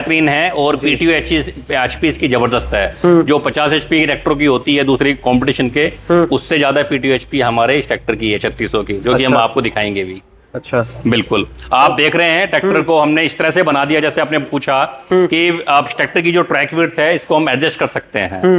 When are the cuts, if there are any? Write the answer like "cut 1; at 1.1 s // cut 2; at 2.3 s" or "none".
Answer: none